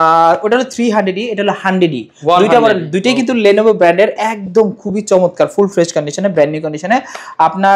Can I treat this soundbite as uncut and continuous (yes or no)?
yes